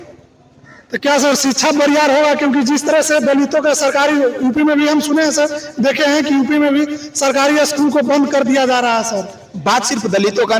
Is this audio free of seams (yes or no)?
yes